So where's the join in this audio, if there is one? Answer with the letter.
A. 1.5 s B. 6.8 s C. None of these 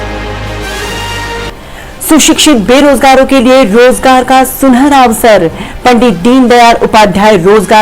A